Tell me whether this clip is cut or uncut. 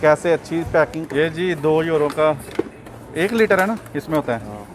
cut